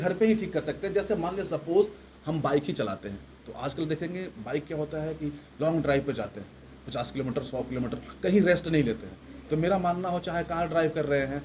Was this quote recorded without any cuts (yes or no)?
yes